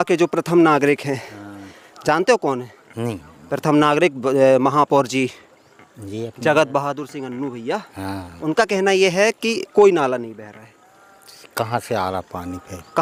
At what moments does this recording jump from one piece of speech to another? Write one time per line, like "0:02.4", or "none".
none